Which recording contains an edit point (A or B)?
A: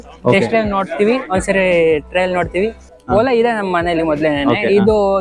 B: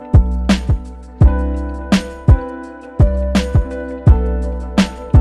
A